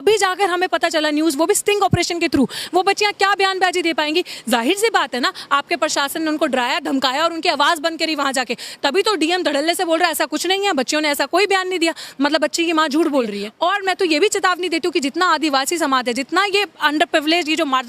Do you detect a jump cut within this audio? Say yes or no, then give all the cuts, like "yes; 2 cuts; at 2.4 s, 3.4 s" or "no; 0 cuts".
yes; 1 cut; at 13.4 s